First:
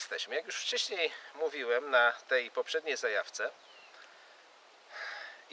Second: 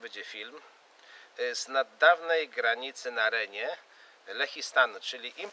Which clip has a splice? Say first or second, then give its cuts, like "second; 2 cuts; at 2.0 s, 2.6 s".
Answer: first; 1 cut; at 2.7 s